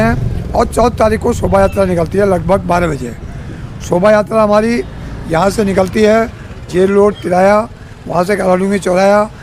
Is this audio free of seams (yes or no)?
yes